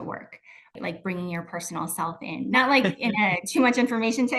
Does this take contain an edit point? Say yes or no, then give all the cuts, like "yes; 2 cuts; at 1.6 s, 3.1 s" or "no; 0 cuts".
yes; 2 cuts; at 0.7 s, 2.5 s